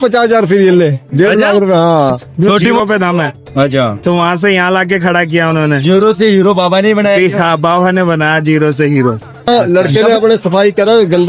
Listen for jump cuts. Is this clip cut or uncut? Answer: cut